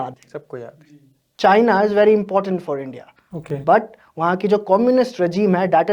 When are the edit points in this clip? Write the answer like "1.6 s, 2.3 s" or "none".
1.3 s